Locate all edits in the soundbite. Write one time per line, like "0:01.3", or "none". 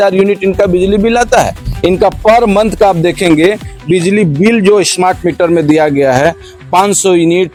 none